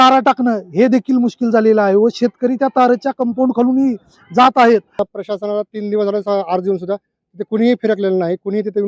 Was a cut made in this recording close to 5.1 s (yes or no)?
yes